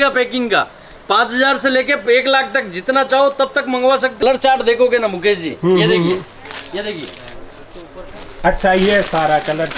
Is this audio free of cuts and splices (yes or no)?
no